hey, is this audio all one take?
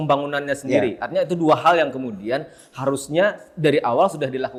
yes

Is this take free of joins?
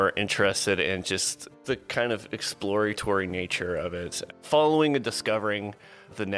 no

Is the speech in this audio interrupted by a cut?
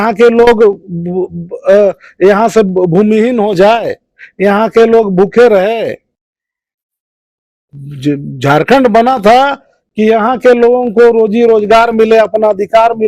no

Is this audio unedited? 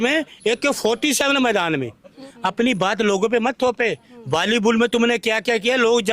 no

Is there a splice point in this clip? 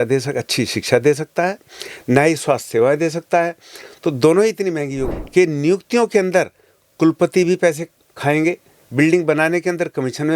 yes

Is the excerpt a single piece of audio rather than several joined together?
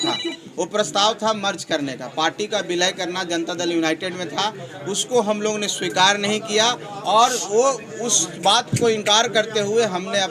yes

